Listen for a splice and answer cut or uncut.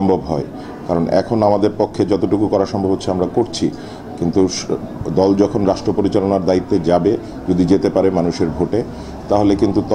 uncut